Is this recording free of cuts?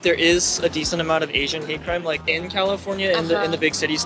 no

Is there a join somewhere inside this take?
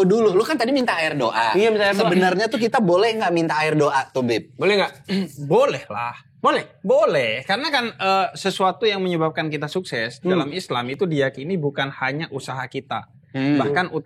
no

